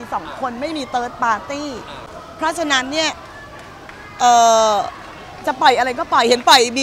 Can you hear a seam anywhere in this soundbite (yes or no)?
no